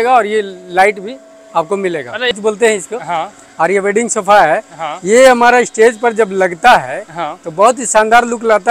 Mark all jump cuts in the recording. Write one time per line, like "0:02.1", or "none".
0:02.3